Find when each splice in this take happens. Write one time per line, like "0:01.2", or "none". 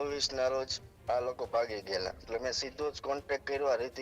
0:02.3